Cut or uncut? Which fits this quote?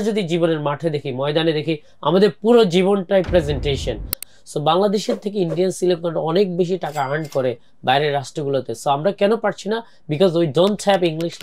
cut